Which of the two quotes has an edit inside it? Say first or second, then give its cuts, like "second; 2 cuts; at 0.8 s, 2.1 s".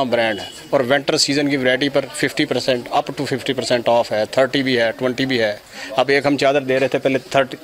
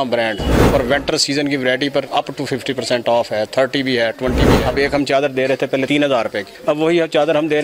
second; 3 cuts; at 2.1 s, 4.6 s, 6.0 s